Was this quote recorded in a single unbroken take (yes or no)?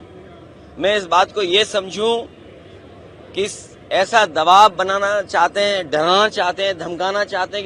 yes